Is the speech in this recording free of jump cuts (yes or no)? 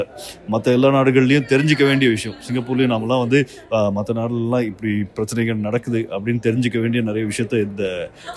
yes